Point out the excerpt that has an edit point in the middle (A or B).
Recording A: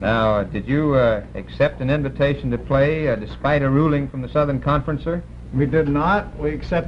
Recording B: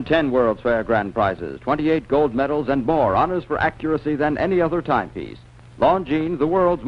B